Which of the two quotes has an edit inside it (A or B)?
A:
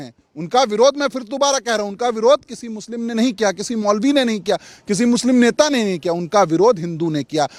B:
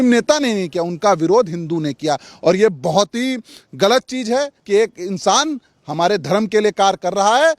B